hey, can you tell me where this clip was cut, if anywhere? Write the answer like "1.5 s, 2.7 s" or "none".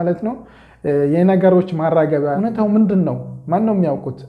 2.2 s

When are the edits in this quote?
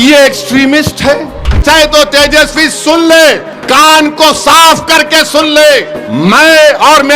1.6 s, 3.5 s, 5.7 s

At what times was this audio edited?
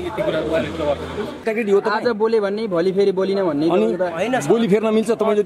1.4 s

